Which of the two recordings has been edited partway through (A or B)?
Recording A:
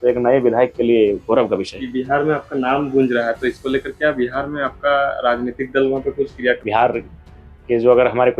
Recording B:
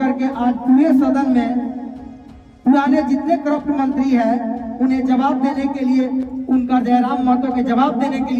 A